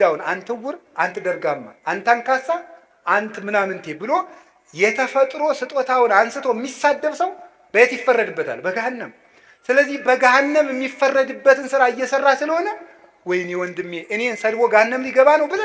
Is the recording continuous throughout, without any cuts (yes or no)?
yes